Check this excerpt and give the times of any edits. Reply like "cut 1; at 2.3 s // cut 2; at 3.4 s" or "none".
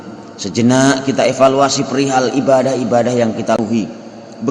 cut 1; at 3.6 s